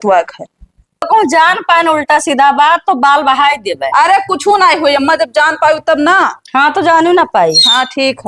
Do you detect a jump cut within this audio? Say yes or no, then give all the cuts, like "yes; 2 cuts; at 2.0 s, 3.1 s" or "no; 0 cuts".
yes; 1 cut; at 1.1 s